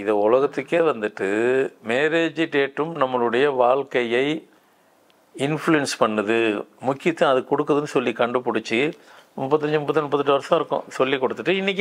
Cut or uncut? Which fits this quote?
uncut